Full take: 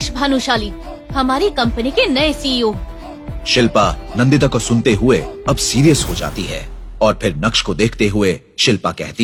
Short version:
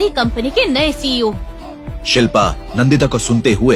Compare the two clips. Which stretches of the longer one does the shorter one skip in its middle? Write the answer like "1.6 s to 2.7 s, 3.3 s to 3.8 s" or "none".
none